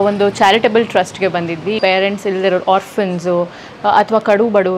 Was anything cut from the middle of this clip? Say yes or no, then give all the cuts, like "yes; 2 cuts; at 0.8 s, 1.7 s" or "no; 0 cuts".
yes; 1 cut; at 1.8 s